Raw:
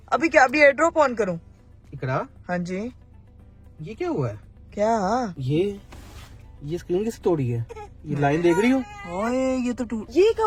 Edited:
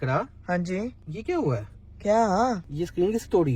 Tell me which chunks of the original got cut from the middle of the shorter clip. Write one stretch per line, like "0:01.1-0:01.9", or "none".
0:03.1-0:03.8
0:05.4-0:06.6